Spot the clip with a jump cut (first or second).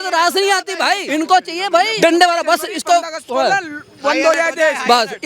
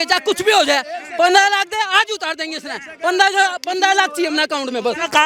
first